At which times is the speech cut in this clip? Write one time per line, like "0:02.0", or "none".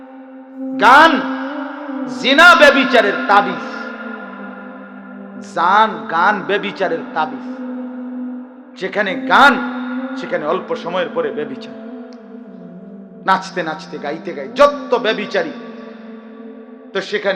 0:07.4
0:08.6
0:11.7
0:13.2